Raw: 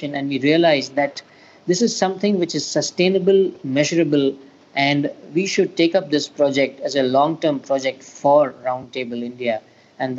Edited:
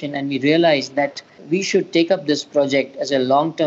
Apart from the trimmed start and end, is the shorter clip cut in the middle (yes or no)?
yes